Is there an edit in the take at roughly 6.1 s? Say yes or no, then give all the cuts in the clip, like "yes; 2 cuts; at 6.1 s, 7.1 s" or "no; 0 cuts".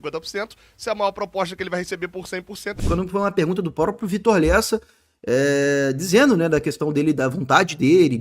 no; 1 cut; at 2.8 s